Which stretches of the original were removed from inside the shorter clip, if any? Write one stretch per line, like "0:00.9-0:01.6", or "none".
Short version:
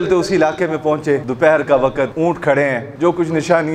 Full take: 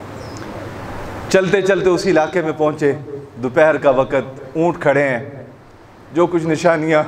0:03.0-0:03.4
0:04.3-0:04.5
0:05.3-0:06.0